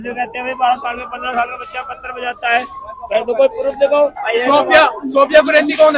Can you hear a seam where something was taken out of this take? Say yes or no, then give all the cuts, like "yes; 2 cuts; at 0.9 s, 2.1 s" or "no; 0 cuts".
yes; 1 cut; at 4.2 s